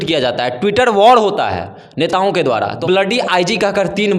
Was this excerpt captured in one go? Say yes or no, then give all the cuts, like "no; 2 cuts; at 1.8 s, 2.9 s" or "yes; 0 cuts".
no; 1 cut; at 2.8 s